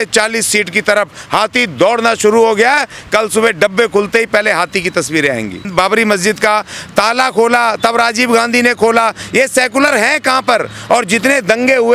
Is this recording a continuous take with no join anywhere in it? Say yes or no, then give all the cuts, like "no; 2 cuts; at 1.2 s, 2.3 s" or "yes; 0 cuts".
no; 1 cut; at 5.7 s